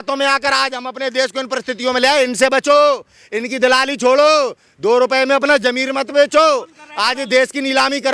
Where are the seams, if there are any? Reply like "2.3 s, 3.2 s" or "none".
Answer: none

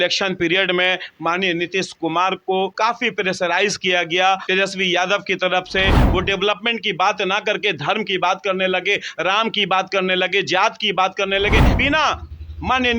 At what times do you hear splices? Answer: 2.7 s, 4.5 s, 6.0 s, 11.8 s

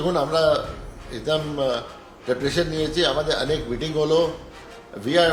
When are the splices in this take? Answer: none

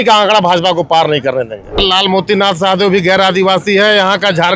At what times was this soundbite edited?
1.8 s

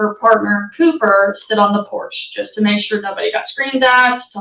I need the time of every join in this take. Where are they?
none

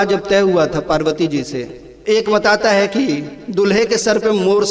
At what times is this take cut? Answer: 2.0 s

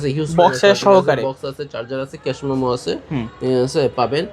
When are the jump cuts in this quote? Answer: none

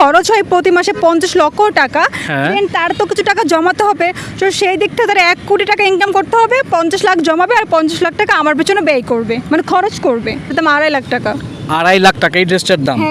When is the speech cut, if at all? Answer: 10.5 s

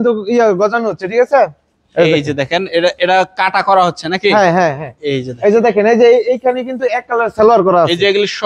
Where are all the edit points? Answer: none

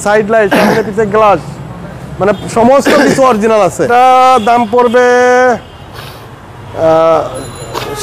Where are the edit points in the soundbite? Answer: none

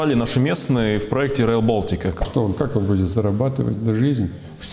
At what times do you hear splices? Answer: 2.2 s

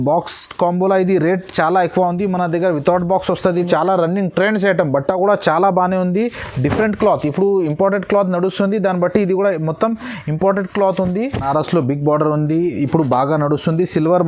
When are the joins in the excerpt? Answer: 3.6 s, 11.4 s

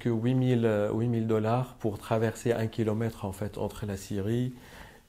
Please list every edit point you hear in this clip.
none

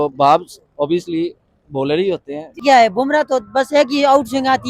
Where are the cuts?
2.6 s

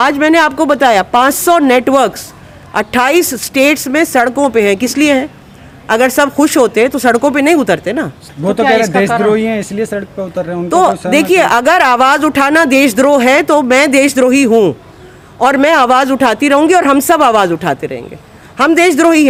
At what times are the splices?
none

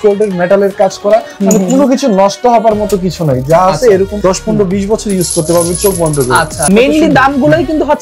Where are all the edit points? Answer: 6.6 s

